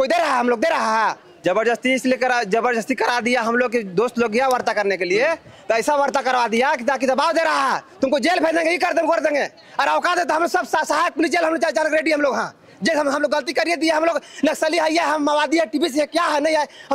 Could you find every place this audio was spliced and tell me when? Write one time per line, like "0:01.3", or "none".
none